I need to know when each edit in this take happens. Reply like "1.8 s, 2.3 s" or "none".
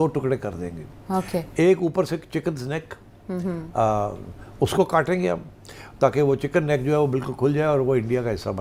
none